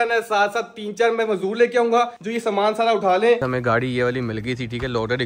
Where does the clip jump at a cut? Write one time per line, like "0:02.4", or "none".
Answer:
0:03.4